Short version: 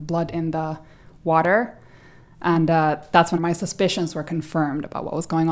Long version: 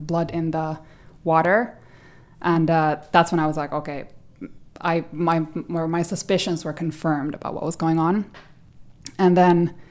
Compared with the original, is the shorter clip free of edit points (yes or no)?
no